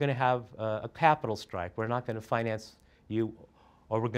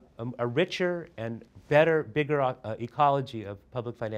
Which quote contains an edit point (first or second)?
second